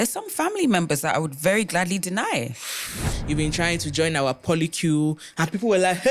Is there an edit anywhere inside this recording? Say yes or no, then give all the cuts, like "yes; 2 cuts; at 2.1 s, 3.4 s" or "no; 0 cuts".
yes; 1 cut; at 3.1 s